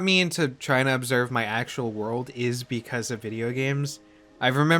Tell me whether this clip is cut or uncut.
uncut